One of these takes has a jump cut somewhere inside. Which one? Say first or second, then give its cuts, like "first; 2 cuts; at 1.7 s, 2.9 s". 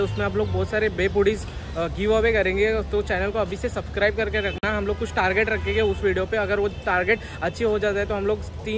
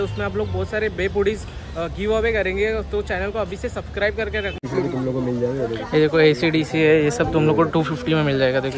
second; 1 cut; at 4.6 s